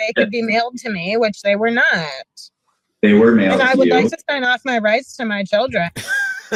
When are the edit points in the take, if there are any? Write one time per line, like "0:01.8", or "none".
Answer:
none